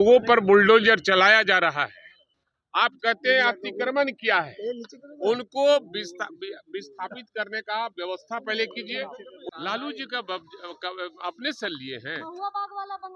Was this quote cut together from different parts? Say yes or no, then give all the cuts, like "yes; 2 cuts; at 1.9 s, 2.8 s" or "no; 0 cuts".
yes; 1 cut; at 9.4 s